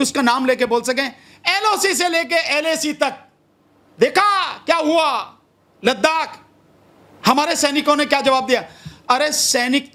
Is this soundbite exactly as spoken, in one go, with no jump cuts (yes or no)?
yes